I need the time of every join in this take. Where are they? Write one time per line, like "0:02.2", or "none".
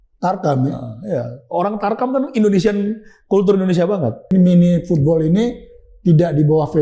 0:04.3